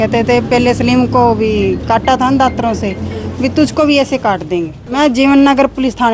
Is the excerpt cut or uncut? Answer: cut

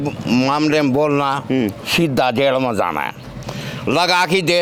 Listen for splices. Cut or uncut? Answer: uncut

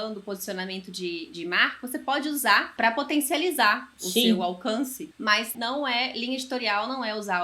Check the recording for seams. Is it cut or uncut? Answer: cut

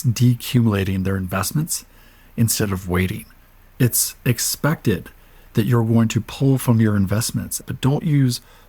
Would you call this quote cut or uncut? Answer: cut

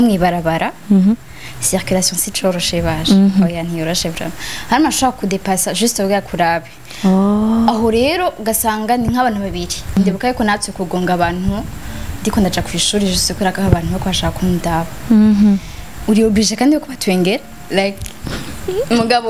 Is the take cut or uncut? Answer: cut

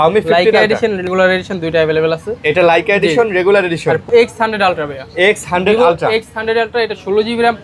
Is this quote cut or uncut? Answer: cut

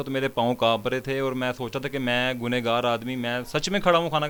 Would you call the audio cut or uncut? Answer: uncut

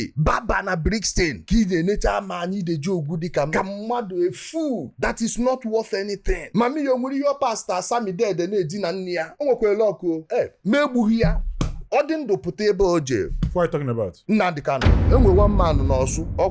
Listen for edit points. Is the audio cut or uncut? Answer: cut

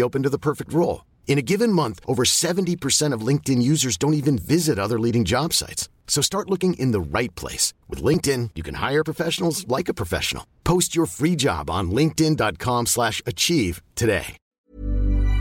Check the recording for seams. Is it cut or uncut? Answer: cut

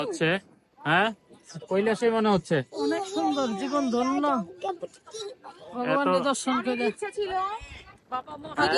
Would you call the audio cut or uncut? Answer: uncut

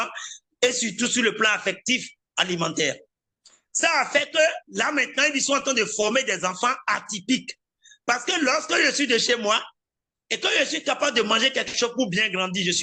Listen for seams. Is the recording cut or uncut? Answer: uncut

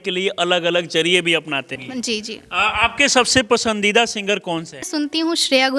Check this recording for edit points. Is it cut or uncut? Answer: cut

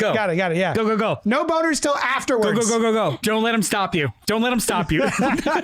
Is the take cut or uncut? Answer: cut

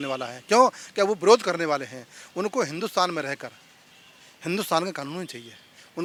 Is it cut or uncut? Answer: uncut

